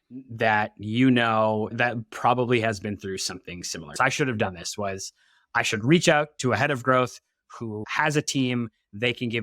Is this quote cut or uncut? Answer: cut